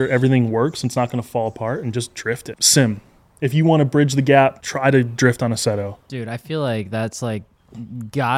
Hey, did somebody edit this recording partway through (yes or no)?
yes